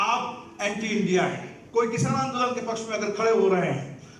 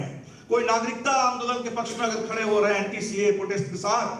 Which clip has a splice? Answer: first; 1 cut; at 1.5 s

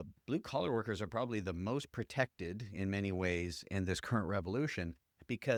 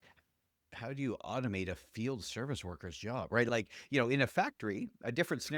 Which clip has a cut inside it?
second; 1 cut; at 3.5 s

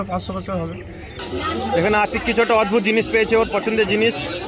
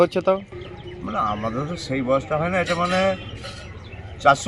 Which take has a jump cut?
first; 1 cut; at 1.1 s

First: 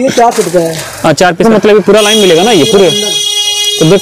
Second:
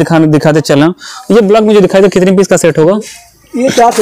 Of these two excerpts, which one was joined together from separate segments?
first; 1 cut; at 1.4 s

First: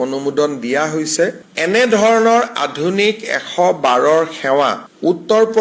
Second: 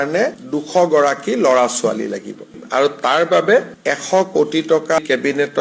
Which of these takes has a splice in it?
second; 1 cut; at 2.6 s

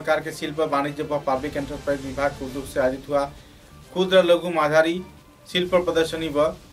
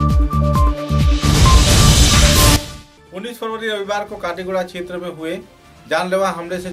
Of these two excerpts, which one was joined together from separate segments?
second; 1 cut; at 2.6 s

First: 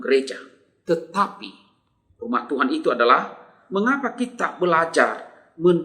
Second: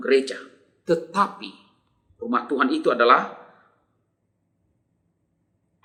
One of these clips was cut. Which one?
first; 1 cut; at 3.5 s

